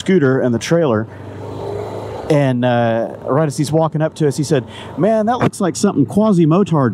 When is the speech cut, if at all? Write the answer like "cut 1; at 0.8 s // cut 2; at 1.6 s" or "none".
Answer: none